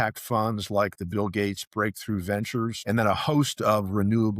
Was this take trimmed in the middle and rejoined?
yes; 1 cut; at 2.8 s

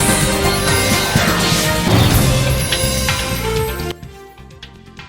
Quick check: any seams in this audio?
no; 0 cuts

